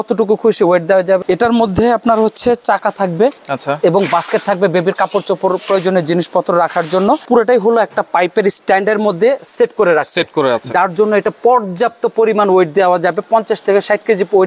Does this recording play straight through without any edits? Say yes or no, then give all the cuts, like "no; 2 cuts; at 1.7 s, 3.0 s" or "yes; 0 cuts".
no; 2 cuts; at 1.2 s, 7.2 s